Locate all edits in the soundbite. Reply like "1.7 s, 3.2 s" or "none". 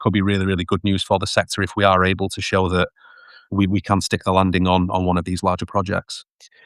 3.4 s

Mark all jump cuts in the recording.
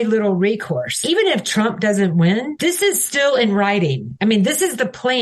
0.9 s, 2.5 s

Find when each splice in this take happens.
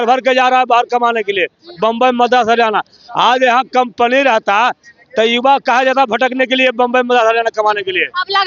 none

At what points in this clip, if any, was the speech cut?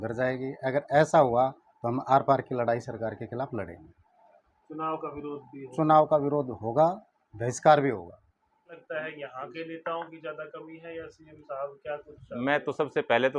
8.8 s

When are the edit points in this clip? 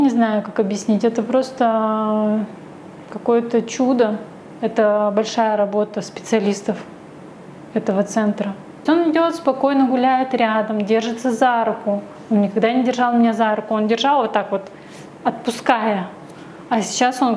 8.8 s

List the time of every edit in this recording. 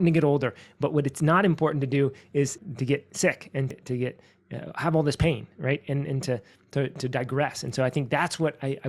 2.6 s, 3.7 s

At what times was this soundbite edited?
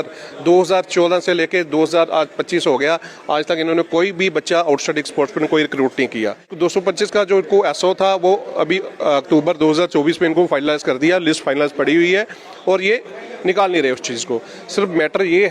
6.5 s

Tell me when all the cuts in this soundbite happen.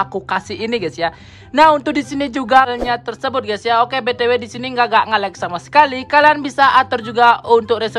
2.7 s

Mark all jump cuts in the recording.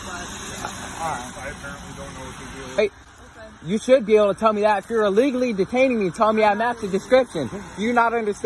2.8 s

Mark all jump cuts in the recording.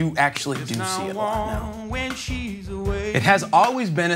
0.8 s, 3.1 s

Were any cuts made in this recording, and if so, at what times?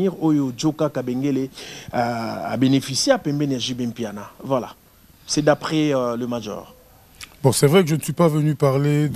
none

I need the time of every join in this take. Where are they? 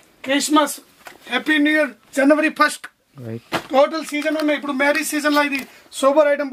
none

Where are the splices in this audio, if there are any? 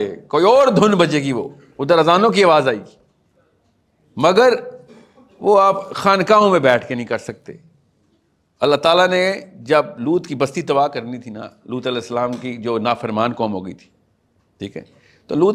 none

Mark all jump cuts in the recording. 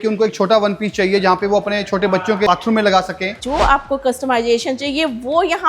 3.4 s

